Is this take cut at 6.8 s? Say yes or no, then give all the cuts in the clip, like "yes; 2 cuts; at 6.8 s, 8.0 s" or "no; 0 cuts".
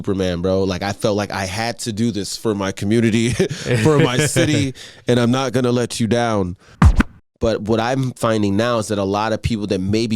yes; 1 cut; at 6.8 s